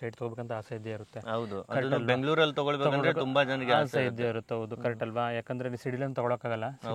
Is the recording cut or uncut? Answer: uncut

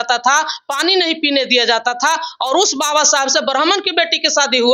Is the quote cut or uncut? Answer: uncut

